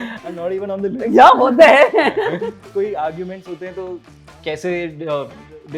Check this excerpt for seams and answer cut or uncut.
cut